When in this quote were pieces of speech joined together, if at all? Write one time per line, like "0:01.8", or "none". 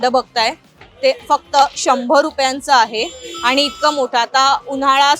none